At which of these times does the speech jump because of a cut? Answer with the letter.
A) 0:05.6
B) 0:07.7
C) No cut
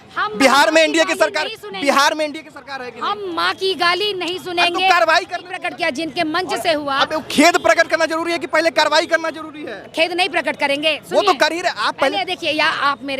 A